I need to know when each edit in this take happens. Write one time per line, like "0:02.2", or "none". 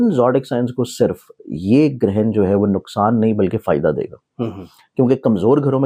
none